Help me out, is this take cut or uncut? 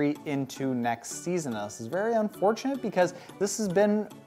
uncut